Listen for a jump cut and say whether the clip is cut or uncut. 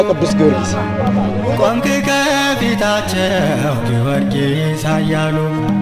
uncut